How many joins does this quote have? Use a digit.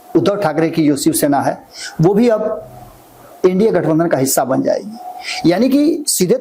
0